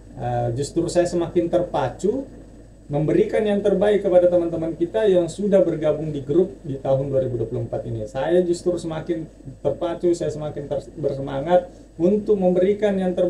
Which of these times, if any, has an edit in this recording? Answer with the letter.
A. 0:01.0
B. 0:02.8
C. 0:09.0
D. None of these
D